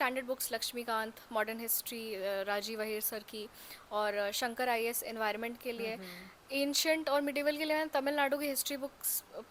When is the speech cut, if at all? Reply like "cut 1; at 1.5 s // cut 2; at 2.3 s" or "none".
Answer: none